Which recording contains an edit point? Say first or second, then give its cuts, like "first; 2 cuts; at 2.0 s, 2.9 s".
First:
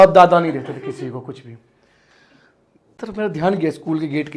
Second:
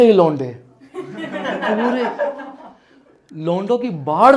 first; 1 cut; at 2.9 s